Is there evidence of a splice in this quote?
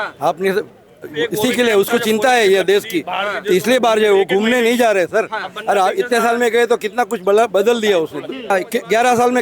yes; 1 cut; at 8.5 s

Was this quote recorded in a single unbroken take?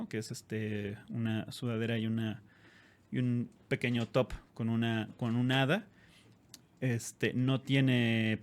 yes; 0 cuts

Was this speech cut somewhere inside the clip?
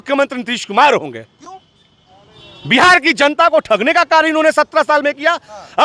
no; 0 cuts

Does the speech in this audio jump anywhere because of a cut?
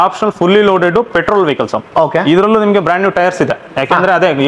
no; 0 cuts

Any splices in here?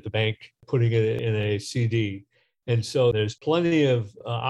yes; 2 cuts; at 1.2 s, 3.2 s

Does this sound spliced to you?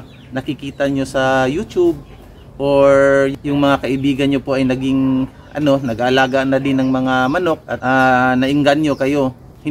no; 0 cuts

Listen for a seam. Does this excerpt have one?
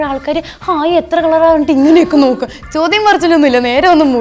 no; 0 cuts

